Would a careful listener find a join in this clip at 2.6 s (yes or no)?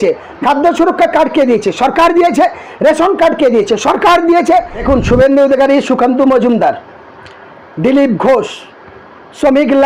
no